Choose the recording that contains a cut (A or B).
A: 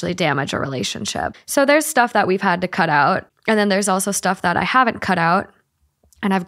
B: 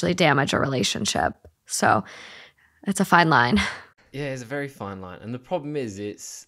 A